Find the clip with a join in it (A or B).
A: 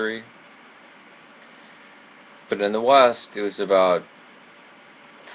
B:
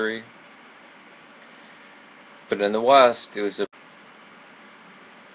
A